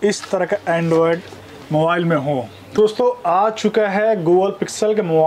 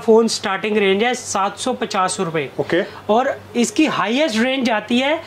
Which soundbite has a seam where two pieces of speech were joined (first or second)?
first